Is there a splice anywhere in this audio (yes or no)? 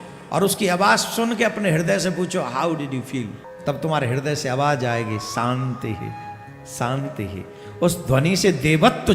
yes